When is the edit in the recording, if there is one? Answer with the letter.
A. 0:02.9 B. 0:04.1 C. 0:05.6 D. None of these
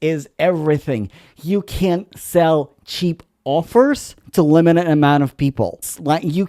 B